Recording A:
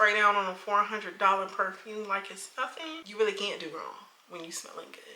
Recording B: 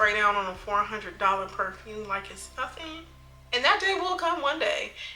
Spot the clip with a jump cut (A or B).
A